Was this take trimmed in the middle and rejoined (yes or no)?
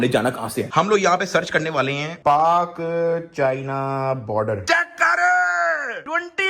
yes